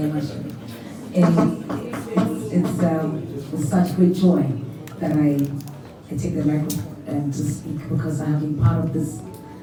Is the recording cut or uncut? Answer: uncut